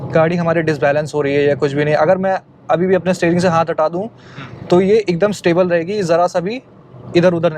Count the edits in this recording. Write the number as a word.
zero